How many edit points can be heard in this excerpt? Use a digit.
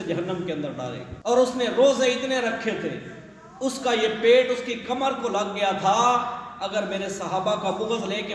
1